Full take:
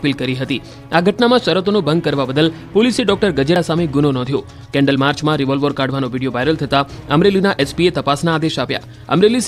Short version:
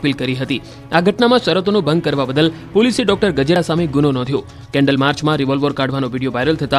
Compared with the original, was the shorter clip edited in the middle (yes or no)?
no